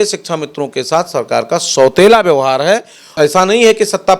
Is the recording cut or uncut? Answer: cut